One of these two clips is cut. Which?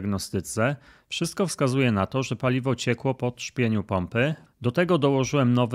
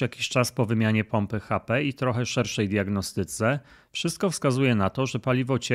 first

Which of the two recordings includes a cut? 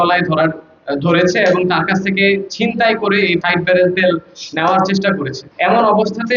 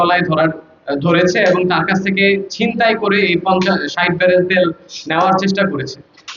first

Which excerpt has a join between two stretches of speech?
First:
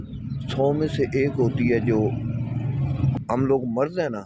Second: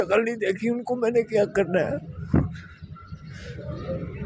first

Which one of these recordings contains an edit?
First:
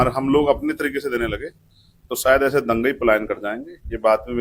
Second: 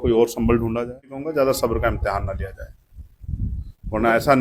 second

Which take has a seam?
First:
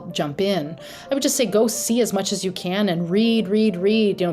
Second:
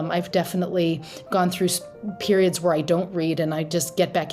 first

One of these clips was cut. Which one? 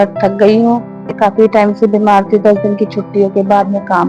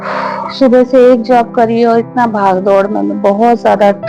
first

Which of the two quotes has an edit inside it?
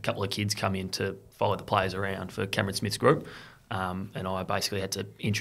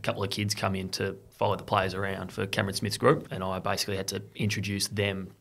second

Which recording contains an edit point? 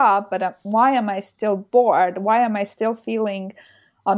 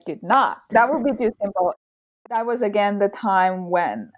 second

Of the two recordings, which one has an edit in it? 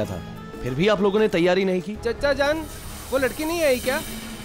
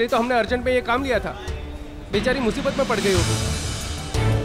first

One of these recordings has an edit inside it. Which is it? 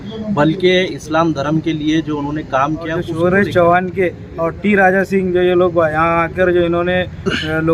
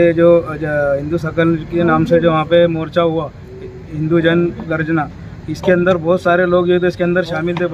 first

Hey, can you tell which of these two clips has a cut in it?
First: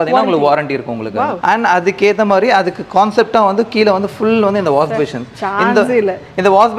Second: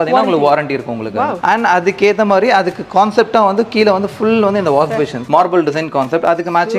second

